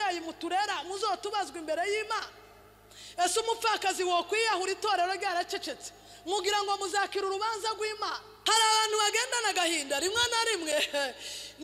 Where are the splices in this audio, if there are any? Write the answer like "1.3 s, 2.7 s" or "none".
8.3 s